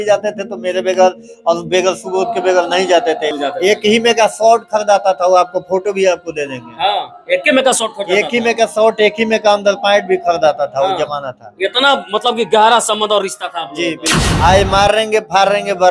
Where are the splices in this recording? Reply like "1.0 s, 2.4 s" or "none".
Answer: 3.4 s, 14.3 s